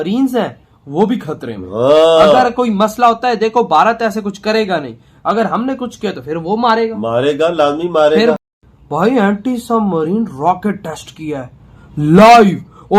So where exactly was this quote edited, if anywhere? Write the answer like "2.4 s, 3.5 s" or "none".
8.4 s